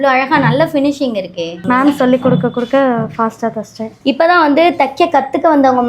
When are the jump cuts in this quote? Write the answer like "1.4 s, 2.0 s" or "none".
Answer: 1.6 s, 3.9 s